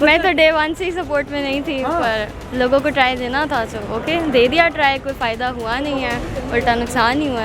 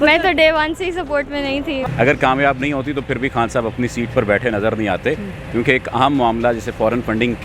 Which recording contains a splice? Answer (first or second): second